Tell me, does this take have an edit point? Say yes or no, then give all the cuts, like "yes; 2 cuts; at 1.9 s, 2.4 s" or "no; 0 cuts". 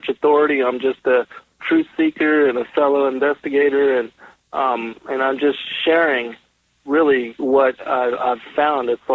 yes; 1 cut; at 5.1 s